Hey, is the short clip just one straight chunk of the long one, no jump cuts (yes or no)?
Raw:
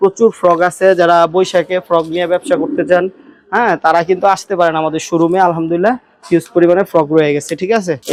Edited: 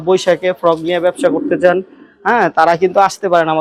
yes